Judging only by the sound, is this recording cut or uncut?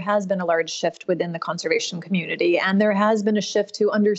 uncut